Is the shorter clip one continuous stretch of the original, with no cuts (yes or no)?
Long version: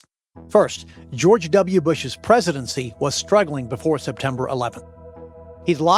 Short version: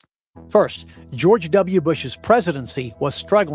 yes